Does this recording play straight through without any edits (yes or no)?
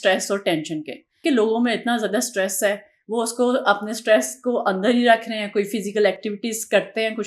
no